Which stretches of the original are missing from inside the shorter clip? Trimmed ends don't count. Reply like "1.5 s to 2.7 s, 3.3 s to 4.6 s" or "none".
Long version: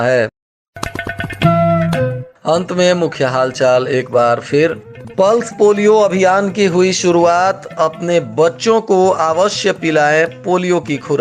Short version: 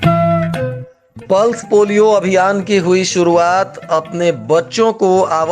2.3 s to 4.8 s